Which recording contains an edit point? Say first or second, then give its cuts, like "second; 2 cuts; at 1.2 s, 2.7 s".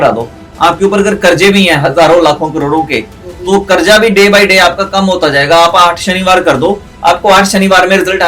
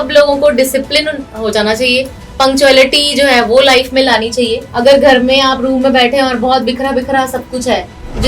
second; 1 cut; at 4.7 s